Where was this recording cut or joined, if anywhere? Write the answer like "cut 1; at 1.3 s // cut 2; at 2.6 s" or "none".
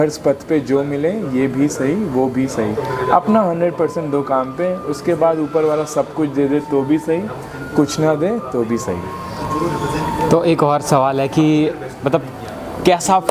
none

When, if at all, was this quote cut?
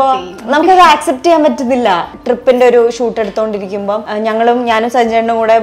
cut 1; at 2.1 s // cut 2; at 4.1 s

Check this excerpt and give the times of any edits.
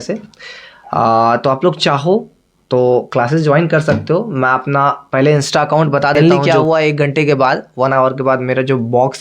cut 1; at 6.2 s

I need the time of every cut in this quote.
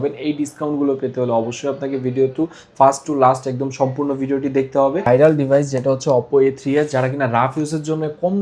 cut 1; at 5.0 s

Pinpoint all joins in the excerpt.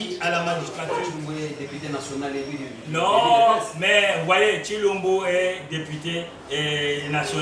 cut 1; at 1.2 s

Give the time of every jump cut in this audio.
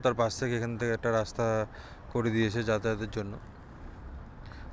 none

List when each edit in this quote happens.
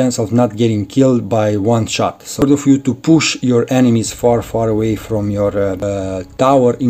cut 1; at 2.4 s // cut 2; at 5.8 s

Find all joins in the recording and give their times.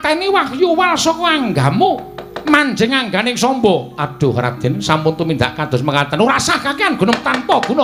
none

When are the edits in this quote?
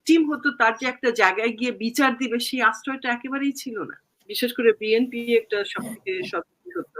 cut 1; at 4.2 s

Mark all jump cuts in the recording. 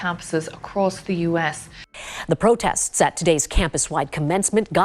cut 1; at 1.7 s

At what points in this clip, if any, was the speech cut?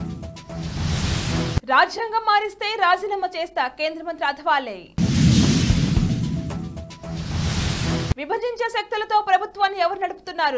none

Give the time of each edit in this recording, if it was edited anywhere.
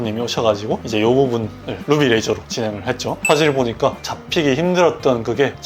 cut 1; at 3.2 s

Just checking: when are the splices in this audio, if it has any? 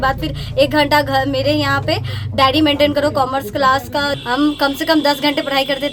cut 1; at 4.2 s

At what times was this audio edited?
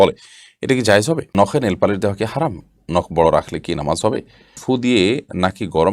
cut 1; at 1.3 s // cut 2; at 4.5 s

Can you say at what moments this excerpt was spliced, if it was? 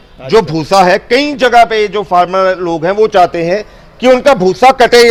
none

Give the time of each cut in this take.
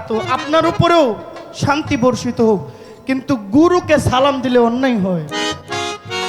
none

